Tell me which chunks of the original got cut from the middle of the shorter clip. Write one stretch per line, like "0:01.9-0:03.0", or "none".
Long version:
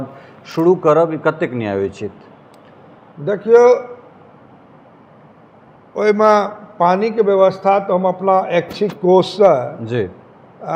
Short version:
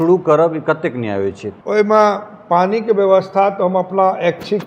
0:02.1-0:05.8

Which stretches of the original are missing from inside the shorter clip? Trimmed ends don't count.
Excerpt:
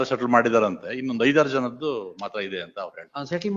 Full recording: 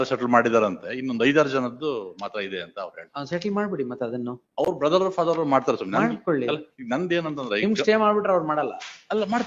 none

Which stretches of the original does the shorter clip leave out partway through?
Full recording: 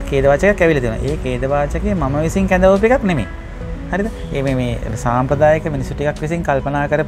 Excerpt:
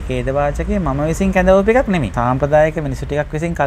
0:03.3-0:05.0

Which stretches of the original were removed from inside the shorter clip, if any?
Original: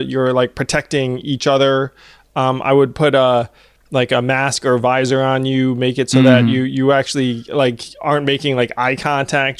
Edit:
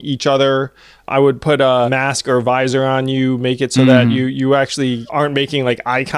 0:02.3-0:02.6
0:03.4-0:04.3
0:07.4-0:08.0

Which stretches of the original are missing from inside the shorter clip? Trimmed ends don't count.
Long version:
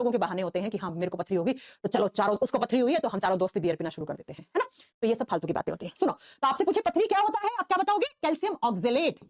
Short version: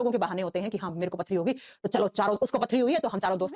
none

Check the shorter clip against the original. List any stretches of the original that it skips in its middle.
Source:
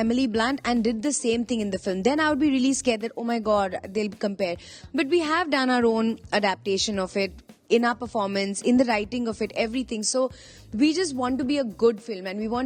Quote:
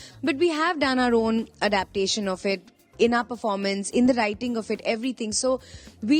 none

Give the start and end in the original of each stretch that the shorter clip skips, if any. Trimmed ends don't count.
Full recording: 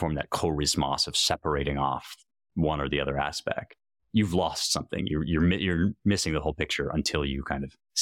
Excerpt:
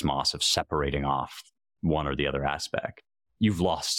none

